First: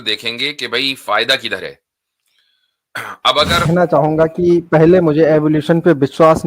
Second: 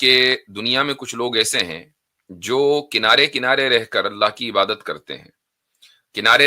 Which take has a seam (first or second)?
first